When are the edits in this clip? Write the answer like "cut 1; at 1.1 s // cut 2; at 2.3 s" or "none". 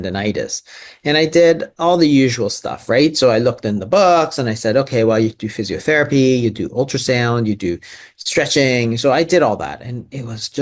none